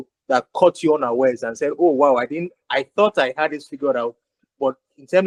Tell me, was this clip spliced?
no; 0 cuts

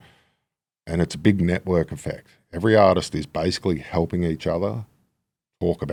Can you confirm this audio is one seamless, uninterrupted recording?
yes; 0 cuts

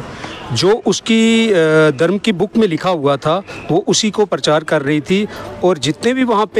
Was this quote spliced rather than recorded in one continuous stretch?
no; 0 cuts

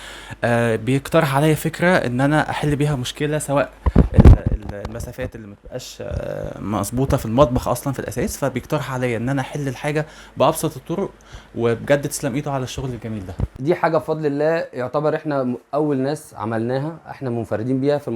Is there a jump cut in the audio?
yes; 1 cut; at 13.4 s

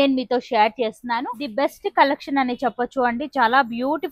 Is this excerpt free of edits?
no; 1 cut; at 1.4 s

